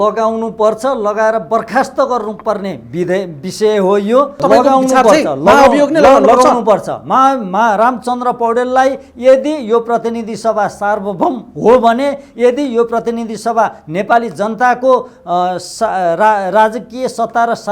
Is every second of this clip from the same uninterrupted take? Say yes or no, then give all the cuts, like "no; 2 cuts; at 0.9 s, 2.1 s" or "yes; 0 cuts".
no; 1 cut; at 4.4 s